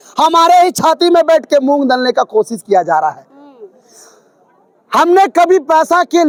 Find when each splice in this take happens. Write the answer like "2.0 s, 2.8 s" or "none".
none